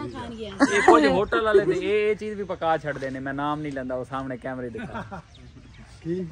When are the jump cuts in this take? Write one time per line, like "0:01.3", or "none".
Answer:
none